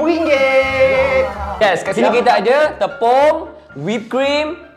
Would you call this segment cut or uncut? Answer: cut